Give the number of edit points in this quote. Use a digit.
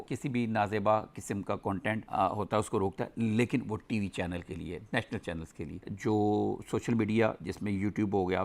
1